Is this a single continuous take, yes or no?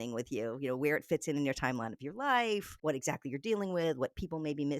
no